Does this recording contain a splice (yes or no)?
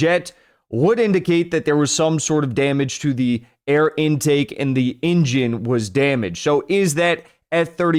no